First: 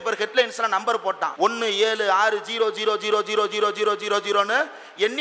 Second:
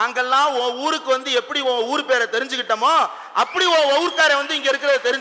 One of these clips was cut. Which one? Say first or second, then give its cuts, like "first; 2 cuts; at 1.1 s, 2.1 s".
first; 1 cut; at 1.3 s